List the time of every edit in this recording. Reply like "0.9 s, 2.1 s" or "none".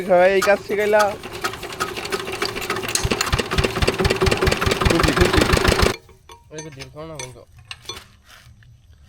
5.9 s